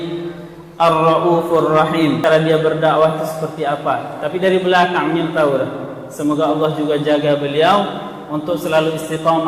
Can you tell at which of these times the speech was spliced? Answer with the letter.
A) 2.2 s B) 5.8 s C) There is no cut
A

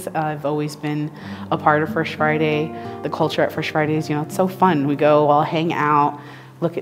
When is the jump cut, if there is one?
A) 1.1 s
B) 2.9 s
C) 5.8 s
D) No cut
B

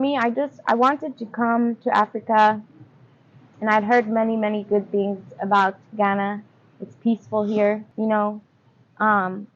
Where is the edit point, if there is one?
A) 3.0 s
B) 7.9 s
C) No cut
B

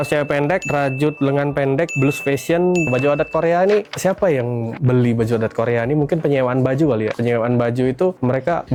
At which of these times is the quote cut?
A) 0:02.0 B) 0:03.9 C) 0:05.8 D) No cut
D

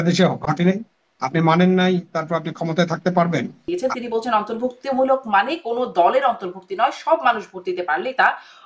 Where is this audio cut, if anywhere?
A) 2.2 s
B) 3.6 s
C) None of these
B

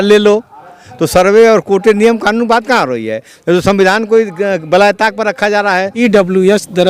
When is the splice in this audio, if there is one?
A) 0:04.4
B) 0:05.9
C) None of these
B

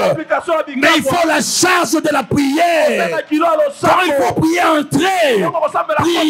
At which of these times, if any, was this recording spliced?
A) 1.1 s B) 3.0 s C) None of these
C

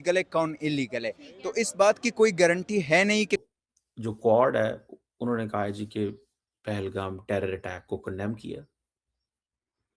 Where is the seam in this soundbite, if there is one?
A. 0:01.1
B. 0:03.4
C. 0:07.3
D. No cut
B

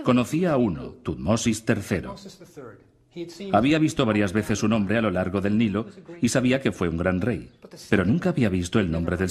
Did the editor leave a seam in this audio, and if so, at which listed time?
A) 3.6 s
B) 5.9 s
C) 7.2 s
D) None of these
A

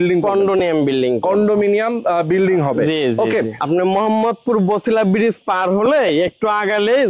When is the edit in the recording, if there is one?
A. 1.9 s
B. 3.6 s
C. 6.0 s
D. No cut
B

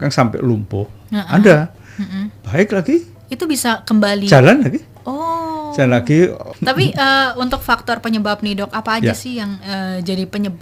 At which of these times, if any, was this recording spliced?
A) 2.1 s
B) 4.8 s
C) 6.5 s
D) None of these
C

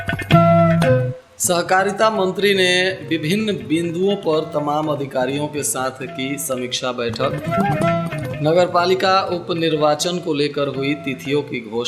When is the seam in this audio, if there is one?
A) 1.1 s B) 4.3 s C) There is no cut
A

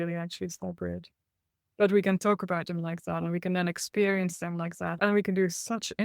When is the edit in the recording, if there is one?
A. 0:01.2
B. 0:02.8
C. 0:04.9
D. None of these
C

